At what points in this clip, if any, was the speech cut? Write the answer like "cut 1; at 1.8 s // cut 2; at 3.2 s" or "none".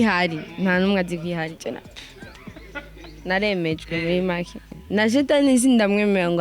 cut 1; at 4.8 s